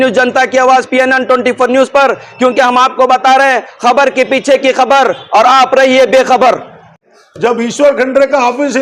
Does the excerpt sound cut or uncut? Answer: cut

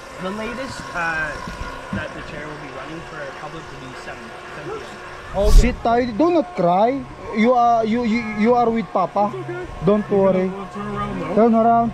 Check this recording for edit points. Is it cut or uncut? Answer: cut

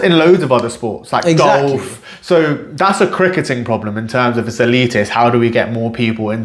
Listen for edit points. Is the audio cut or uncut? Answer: uncut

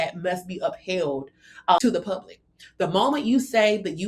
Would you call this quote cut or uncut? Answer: cut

